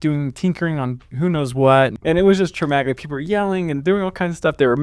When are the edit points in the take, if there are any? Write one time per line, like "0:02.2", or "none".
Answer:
0:02.0

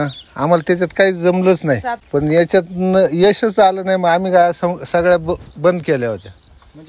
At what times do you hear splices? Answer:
0:02.0

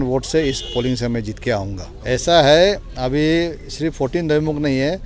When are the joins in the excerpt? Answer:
none

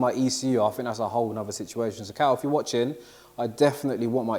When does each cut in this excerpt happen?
none

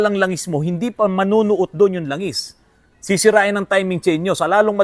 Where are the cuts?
none

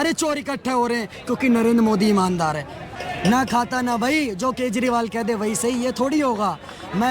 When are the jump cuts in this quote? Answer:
0:02.8

